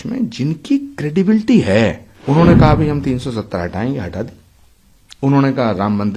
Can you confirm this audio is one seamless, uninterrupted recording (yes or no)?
no